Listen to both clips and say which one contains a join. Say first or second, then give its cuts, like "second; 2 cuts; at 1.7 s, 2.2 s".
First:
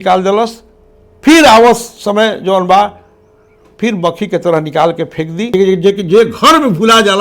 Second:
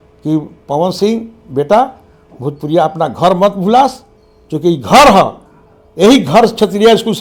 first; 1 cut; at 5.4 s